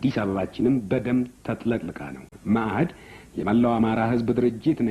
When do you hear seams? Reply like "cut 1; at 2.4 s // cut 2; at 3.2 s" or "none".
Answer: cut 1; at 2.3 s